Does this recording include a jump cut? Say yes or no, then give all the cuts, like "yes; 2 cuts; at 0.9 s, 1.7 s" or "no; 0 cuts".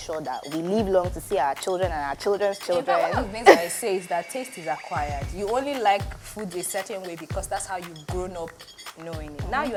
no; 0 cuts